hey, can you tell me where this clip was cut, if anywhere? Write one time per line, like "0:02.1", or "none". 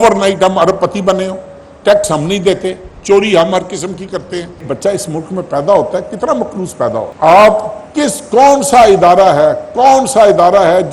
0:04.6
0:07.1